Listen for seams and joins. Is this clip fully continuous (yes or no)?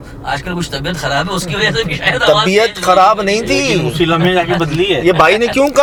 yes